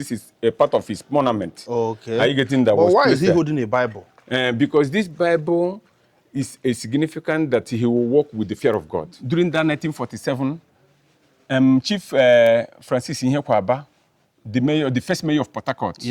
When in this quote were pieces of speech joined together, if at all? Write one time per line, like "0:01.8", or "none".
0:09.2